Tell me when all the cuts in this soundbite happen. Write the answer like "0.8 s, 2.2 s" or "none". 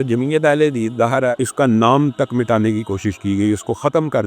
1.4 s